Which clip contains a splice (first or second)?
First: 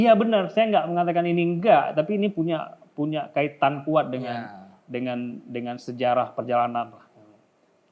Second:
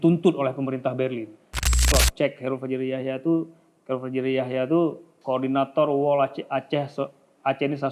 second